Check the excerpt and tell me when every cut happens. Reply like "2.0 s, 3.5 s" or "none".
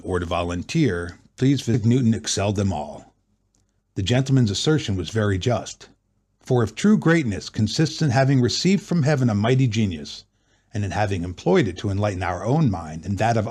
none